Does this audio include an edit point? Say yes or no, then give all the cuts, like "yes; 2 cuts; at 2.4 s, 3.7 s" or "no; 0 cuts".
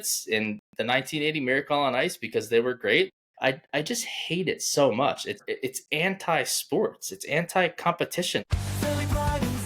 yes; 3 cuts; at 3.1 s, 5.4 s, 8.5 s